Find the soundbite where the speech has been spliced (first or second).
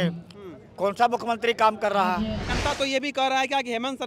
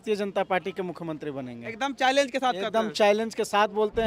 first